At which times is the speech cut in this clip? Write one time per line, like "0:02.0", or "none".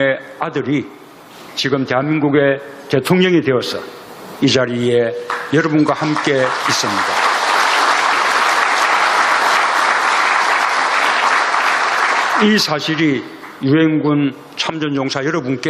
0:13.3